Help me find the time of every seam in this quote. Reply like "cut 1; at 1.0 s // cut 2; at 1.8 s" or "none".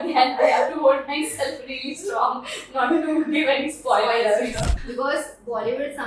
cut 1; at 4.7 s